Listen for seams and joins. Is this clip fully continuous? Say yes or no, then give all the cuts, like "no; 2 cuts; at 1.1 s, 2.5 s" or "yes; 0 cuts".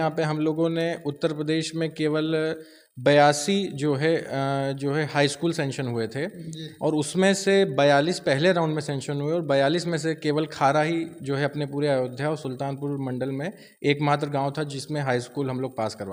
yes; 0 cuts